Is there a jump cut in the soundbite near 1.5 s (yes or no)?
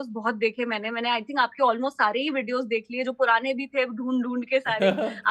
no